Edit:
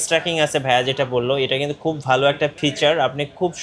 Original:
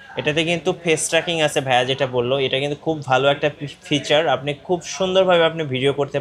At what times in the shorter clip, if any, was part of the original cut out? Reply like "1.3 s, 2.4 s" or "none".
2.6 s